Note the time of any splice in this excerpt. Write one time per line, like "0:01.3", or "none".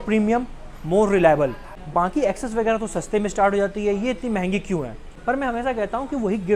0:01.7
0:05.0